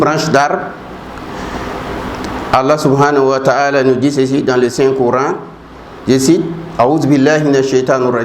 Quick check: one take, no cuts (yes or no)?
no